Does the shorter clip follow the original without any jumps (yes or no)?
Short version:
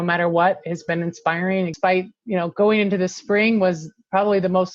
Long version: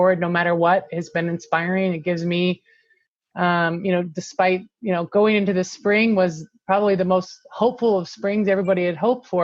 no